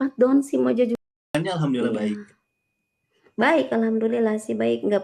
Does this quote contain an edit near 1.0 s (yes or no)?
yes